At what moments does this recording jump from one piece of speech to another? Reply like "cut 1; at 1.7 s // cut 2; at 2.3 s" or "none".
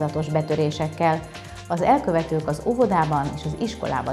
none